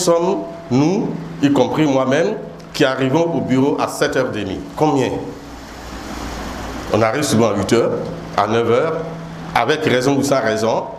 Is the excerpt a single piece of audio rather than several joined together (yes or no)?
yes